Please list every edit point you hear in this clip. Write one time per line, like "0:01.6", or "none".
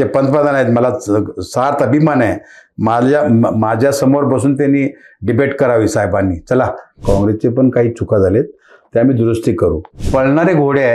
0:07.0
0:09.9